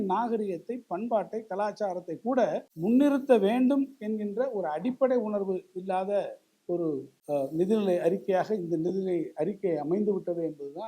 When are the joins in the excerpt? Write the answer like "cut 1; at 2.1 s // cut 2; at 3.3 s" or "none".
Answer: cut 1; at 2.7 s // cut 2; at 7.1 s